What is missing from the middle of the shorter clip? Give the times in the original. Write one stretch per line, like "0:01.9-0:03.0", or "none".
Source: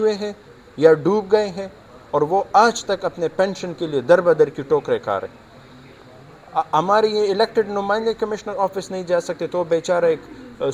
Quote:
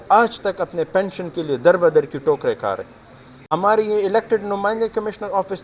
0:06.0-0:06.8